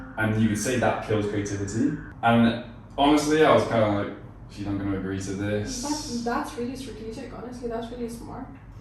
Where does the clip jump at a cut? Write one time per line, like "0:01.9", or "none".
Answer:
0:02.1